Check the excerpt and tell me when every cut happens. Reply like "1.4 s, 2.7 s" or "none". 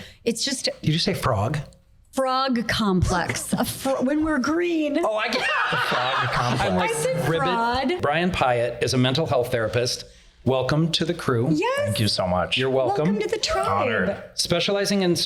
8.0 s